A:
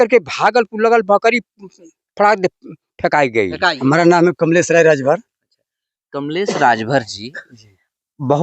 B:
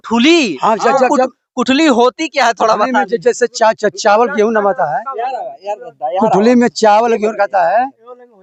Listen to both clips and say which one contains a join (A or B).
A